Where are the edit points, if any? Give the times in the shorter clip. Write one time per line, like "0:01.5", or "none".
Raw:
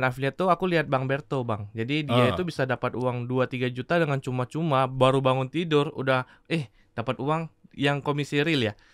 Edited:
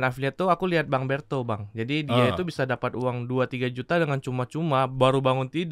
none